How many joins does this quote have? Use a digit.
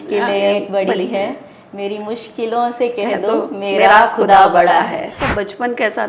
1